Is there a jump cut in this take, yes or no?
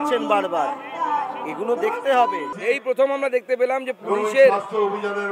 yes